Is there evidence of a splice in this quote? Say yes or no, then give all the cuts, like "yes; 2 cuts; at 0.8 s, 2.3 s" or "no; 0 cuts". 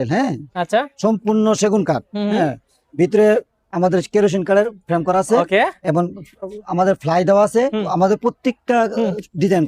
no; 0 cuts